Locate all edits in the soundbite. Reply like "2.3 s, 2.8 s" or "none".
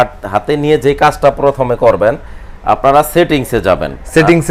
none